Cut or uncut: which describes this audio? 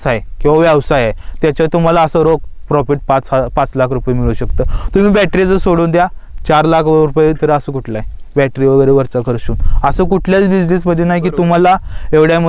uncut